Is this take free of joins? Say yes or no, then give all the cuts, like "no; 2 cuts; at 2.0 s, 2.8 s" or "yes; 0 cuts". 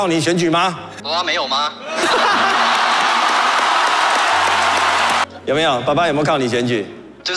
no; 2 cuts; at 0.9 s, 5.3 s